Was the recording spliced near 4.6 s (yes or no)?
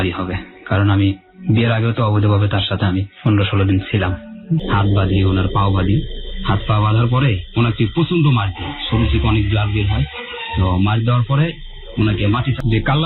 yes